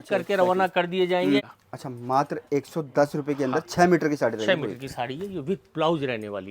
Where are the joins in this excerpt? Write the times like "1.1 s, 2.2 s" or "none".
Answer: 1.4 s